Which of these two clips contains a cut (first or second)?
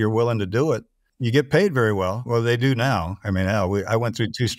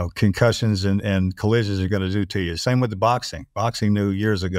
first